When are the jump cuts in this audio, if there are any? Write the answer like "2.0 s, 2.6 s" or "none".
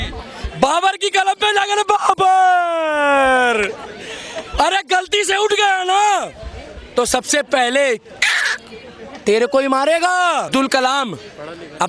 10.5 s